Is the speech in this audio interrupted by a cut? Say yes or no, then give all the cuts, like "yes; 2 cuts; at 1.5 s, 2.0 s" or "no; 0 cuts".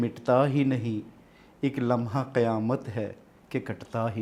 no; 0 cuts